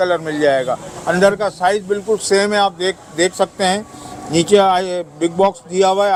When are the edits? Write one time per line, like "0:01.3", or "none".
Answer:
none